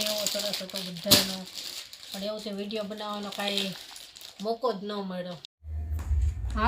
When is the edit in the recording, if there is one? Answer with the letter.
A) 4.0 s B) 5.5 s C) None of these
B